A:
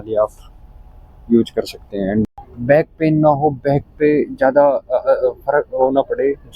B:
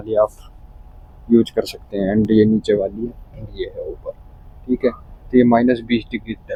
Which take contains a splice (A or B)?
A